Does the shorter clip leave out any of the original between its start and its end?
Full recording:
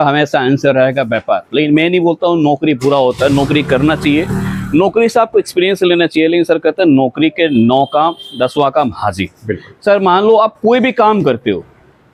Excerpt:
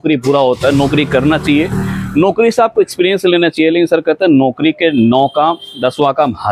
no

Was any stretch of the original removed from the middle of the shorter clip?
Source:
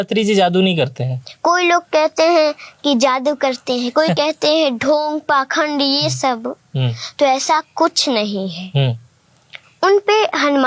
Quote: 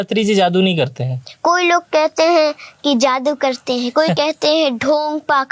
no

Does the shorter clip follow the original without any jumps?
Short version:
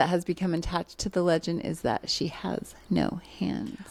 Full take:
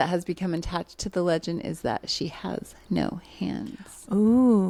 yes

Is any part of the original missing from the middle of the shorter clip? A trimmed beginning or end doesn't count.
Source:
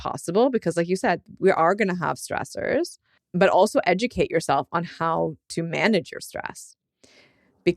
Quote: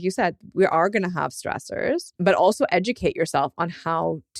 yes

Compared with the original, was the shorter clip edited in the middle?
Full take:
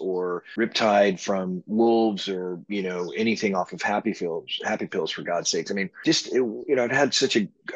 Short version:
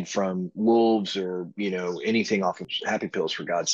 yes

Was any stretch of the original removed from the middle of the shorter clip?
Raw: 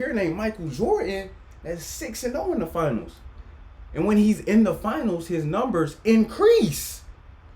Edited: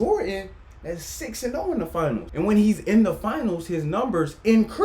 yes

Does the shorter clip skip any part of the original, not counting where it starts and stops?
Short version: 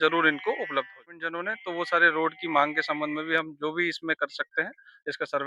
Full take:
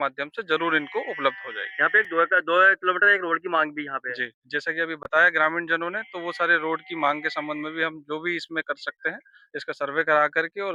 yes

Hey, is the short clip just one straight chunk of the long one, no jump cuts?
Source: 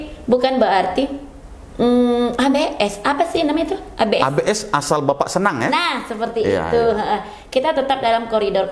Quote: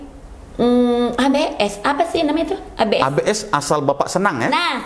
yes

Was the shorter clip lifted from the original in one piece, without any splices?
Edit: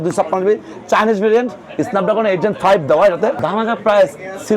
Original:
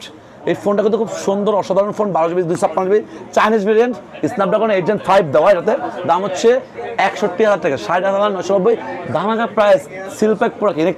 no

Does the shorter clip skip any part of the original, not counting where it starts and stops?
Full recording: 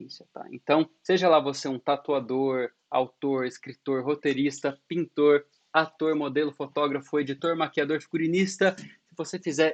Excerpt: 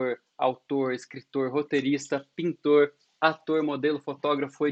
no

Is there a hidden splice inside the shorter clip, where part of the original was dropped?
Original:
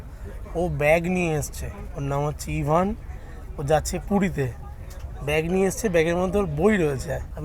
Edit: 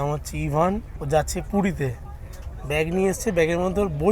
yes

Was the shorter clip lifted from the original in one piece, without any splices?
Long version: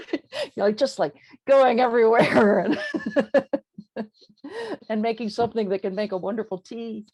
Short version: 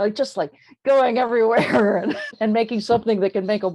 no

